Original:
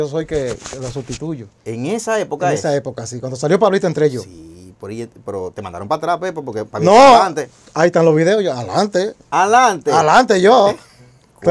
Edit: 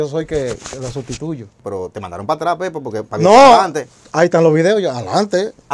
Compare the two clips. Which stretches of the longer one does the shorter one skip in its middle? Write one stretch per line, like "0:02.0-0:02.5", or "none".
0:01.5-0:05.1

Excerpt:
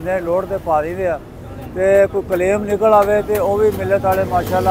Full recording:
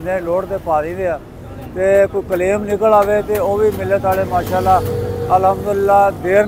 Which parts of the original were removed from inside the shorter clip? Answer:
none

